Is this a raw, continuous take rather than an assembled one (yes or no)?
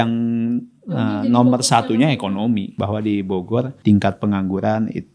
no